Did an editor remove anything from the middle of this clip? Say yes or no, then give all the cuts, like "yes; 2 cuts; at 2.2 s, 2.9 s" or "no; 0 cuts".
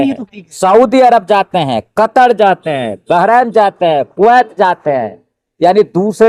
no; 0 cuts